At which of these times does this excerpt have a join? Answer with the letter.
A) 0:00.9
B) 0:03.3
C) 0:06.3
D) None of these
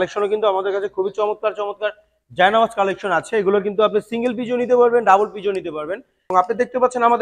C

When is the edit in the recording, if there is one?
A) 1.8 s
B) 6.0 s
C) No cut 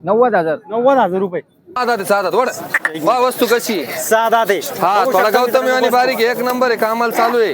A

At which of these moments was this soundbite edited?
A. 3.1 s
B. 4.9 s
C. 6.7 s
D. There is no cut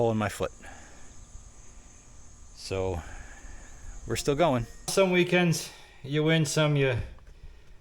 B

